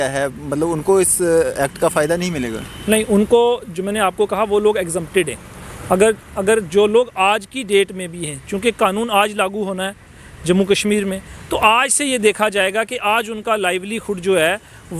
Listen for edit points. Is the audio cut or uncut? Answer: uncut